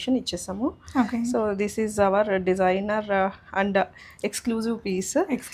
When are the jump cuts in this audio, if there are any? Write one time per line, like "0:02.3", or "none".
none